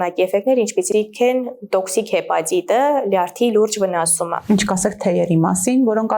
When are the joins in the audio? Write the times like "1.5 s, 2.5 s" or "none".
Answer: 4.5 s